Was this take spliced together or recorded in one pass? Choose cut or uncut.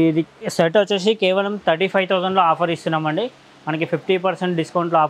uncut